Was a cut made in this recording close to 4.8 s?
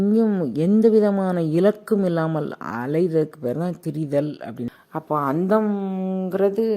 yes; 1 cut; at 4.8 s

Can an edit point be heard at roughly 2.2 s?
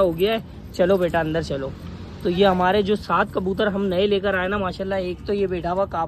no; 0 cuts

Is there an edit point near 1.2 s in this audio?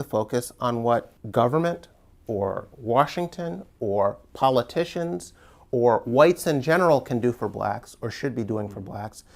yes; 1 cut; at 1.2 s

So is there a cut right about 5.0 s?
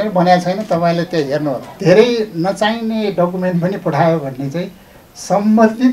no; 1 cut; at 1.7 s

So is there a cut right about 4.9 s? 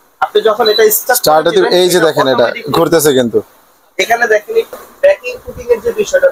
yes; 1 cut; at 4.9 s

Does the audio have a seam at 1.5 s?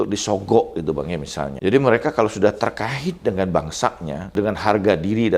yes; 2 cuts; at 1.5 s, 4.3 s

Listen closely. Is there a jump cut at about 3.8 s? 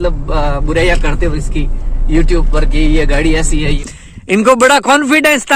yes; 1 cut; at 3.8 s

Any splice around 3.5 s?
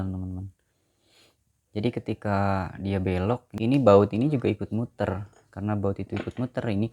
yes; 1 cut; at 3.5 s

